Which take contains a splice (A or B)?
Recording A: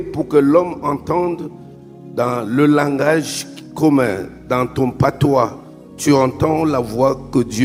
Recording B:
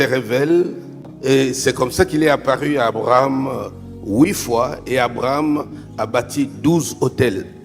B